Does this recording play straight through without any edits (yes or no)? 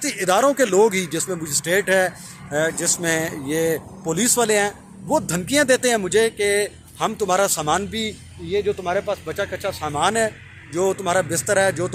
yes